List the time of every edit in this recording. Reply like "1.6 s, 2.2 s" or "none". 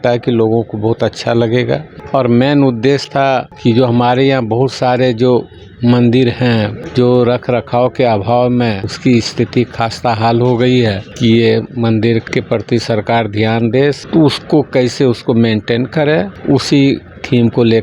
1.9 s, 3.5 s, 6.8 s, 8.9 s, 11.1 s, 12.2 s, 14.0 s, 16.3 s